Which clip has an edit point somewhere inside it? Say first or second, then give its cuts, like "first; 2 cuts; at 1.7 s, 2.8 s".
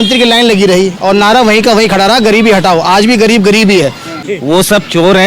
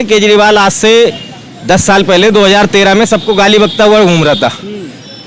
first; 1 cut; at 4.2 s